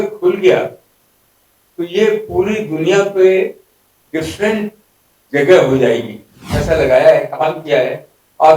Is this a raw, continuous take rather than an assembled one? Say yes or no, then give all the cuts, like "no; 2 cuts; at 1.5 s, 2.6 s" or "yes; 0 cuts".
no; 1 cut; at 6.5 s